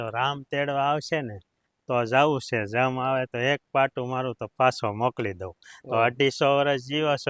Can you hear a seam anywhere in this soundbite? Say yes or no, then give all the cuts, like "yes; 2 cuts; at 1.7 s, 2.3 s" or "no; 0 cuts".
no; 0 cuts